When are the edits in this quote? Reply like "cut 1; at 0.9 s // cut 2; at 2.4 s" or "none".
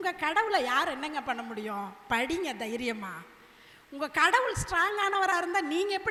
none